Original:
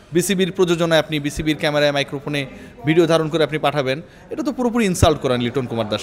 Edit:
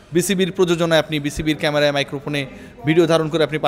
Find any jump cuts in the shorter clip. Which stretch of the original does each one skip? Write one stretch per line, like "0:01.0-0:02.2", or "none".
none